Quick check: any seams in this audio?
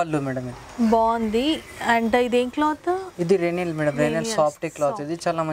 no; 0 cuts

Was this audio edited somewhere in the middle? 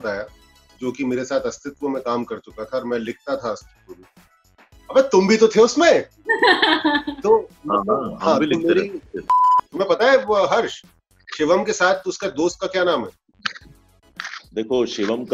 yes; 1 cut; at 9.4 s

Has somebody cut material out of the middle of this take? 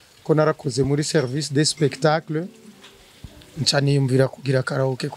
no; 0 cuts

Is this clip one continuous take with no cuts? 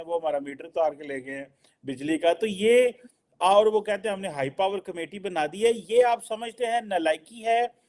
yes; 0 cuts

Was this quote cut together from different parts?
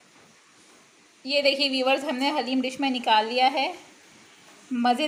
no; 0 cuts

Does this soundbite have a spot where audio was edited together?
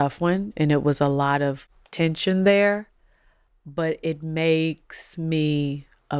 yes; 1 cut; at 1.6 s

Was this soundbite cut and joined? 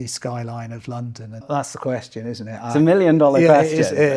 yes; 1 cut; at 1.4 s

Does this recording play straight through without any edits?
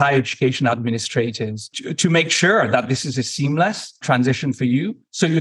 no; 1 cut; at 4.0 s

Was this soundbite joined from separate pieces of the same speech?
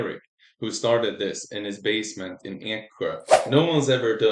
yes; 1 cut; at 3.3 s

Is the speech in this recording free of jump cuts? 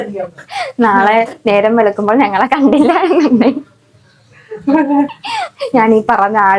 yes; 0 cuts

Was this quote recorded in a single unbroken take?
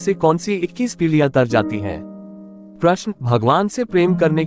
no; 1 cut; at 2.2 s

